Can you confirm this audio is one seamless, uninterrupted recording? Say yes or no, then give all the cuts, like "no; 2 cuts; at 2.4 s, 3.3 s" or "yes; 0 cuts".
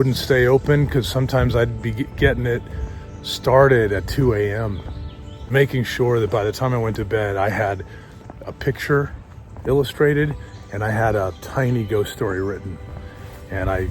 no; 1 cut; at 5.5 s